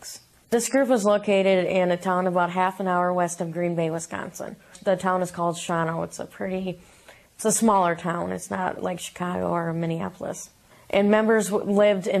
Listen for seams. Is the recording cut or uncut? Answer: cut